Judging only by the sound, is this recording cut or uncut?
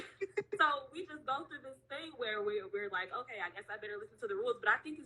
uncut